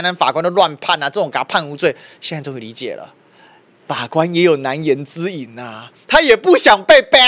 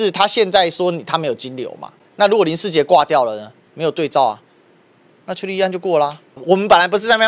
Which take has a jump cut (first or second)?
second